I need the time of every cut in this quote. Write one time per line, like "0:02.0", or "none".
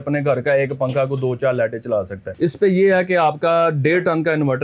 0:02.2